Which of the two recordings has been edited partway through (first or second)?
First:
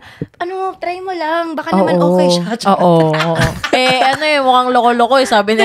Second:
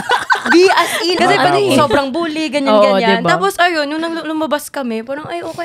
second